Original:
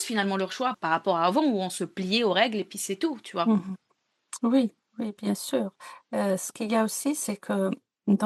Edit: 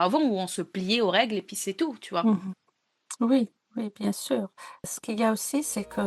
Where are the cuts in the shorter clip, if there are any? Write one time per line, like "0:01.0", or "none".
0:04.9

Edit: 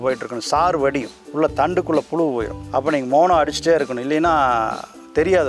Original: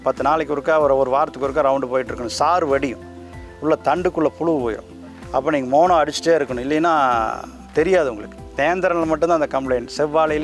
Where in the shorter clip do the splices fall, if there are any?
0:01.1
0:02.6

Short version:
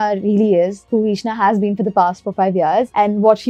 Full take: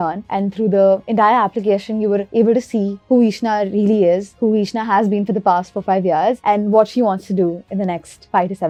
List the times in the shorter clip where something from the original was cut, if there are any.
none

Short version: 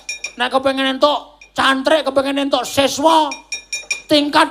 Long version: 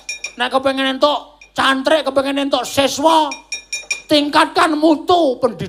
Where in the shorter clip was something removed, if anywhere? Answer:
none

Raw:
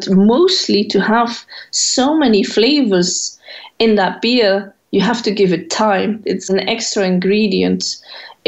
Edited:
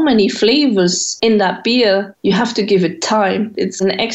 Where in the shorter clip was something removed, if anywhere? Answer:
0:01.1
0:02.1

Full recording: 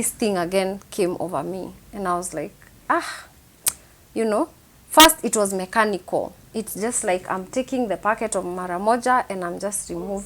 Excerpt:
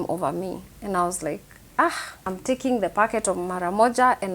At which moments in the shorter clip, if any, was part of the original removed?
0:02.3

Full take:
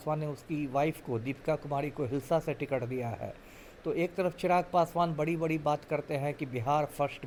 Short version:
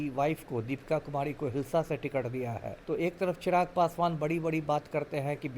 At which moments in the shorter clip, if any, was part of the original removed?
0:02.7

